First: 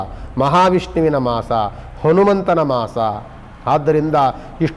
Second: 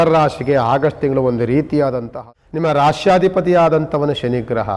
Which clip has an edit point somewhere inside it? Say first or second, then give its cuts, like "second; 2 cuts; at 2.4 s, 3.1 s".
second; 1 cut; at 2.1 s